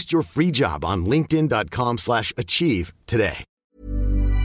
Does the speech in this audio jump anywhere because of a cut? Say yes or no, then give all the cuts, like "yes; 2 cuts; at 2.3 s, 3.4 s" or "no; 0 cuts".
yes; 1 cut; at 3.5 s